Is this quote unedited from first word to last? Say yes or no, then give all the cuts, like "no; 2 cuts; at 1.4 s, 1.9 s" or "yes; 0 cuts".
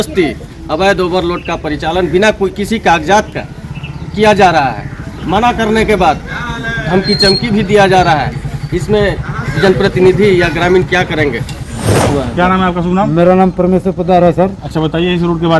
no; 1 cut; at 12.1 s